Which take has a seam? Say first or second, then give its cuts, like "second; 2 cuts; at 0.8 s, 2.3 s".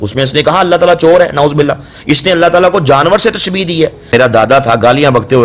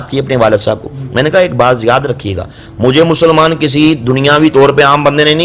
first; 1 cut; at 4.1 s